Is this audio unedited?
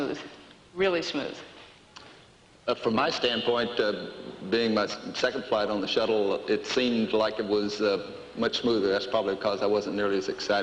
no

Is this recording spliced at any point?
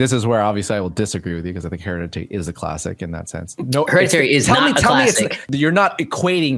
yes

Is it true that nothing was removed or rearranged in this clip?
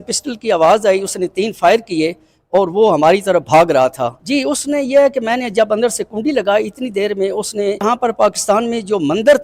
no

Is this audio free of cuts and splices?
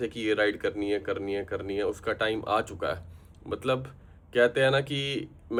yes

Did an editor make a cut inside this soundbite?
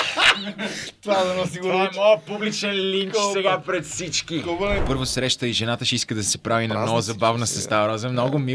yes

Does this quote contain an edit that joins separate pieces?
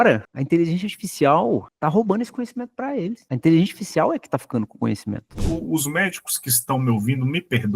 yes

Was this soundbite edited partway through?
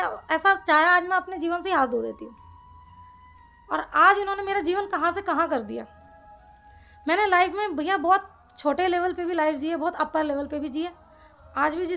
no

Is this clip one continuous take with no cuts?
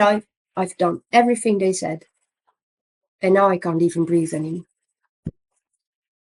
yes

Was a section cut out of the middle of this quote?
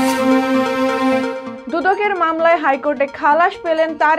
yes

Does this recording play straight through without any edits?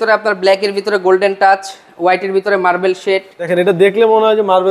no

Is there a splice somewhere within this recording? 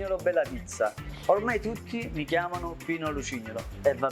no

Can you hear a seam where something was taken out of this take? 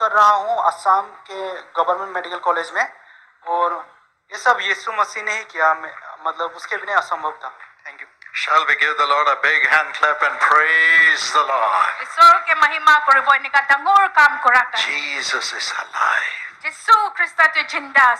no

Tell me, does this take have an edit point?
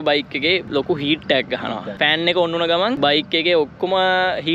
yes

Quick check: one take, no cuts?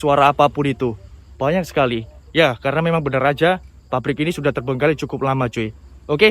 yes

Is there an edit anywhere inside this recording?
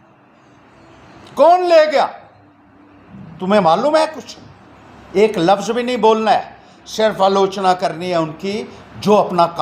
no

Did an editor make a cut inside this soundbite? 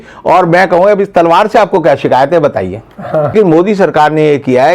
yes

